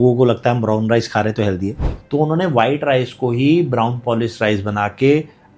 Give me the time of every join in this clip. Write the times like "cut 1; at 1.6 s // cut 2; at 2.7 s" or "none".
cut 1; at 1.9 s